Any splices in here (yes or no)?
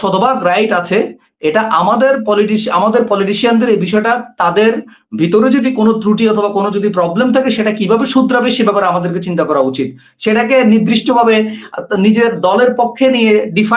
no